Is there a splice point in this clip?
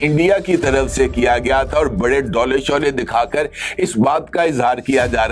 no; 0 cuts

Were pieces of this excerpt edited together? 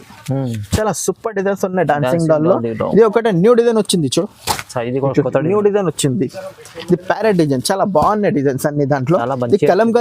no; 0 cuts

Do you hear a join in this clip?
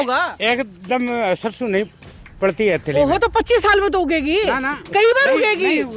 no; 0 cuts

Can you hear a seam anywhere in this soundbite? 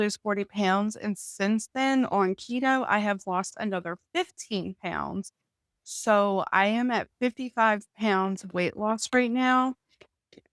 no; 0 cuts

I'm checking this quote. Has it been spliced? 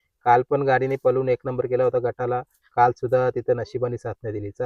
no; 0 cuts

